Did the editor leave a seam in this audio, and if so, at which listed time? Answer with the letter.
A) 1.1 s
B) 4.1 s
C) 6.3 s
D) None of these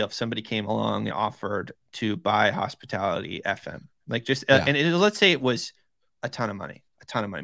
A